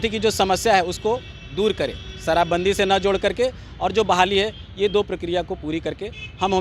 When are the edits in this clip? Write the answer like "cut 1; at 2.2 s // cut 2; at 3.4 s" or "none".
none